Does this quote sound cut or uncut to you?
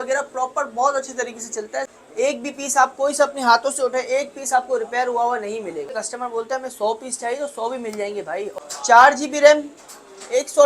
cut